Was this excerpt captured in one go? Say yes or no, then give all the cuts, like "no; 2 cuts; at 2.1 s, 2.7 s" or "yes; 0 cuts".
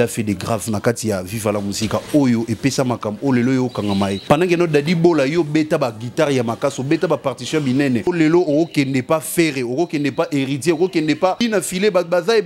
no; 3 cuts; at 4.2 s, 8.1 s, 11.4 s